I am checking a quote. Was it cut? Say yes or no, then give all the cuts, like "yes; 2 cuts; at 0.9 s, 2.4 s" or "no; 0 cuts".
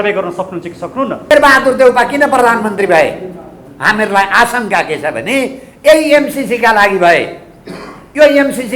yes; 1 cut; at 1.3 s